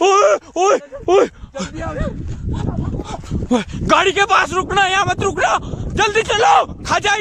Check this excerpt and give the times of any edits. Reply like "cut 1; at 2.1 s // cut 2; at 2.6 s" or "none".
none